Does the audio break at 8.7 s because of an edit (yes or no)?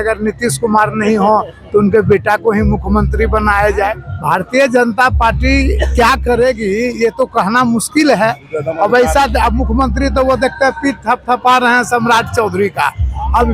no